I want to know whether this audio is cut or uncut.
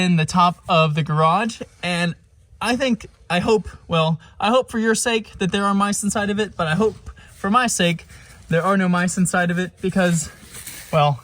uncut